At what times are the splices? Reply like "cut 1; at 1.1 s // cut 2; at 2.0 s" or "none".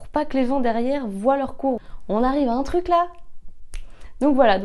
none